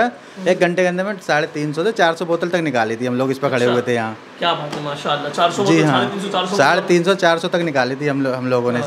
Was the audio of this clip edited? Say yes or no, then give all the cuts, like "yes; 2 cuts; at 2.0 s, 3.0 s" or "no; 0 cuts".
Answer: no; 0 cuts